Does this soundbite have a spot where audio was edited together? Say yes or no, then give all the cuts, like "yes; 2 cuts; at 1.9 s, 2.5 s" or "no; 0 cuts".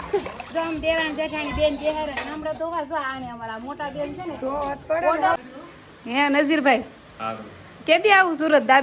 yes; 1 cut; at 5.3 s